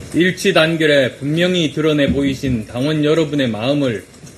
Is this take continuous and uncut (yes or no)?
no